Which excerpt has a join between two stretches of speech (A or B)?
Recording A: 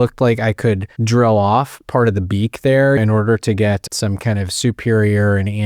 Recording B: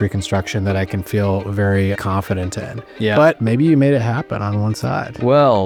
A